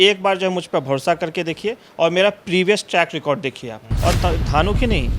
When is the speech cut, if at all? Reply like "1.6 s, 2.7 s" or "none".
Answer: 3.9 s